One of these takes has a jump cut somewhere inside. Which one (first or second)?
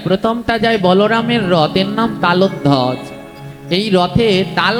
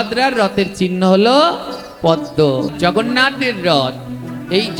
second